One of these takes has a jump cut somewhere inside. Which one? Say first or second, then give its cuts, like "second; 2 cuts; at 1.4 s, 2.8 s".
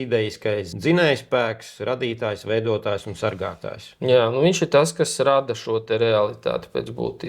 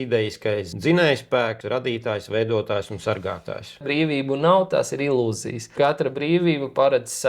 second; 2 cuts; at 1.6 s, 3.8 s